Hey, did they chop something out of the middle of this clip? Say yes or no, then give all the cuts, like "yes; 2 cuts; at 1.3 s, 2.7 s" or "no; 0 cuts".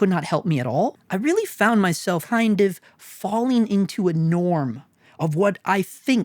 yes; 1 cut; at 1.0 s